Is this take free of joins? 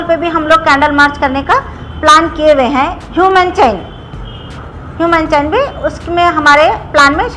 yes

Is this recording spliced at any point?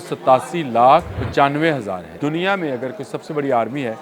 yes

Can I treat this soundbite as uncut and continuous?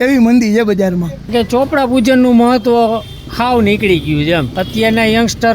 no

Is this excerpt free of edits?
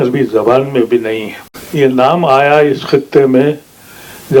no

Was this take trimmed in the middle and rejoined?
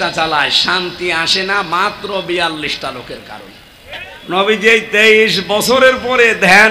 yes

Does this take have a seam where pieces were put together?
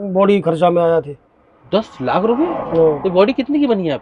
no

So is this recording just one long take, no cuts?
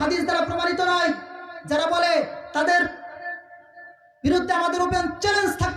yes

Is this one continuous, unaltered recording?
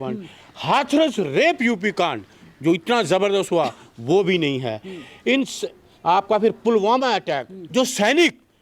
yes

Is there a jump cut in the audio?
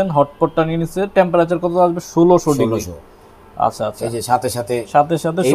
no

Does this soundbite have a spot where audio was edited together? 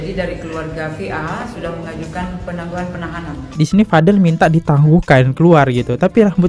yes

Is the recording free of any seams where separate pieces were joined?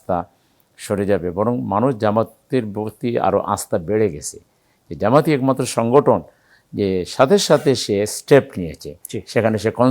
yes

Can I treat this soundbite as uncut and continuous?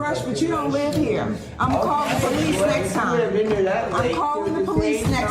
yes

